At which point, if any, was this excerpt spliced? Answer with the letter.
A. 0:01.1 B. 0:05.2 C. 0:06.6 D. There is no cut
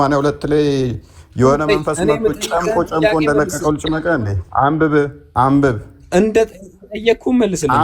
B